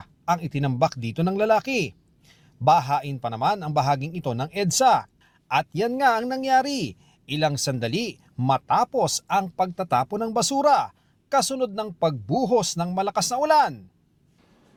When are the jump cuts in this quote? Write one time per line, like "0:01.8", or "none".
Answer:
none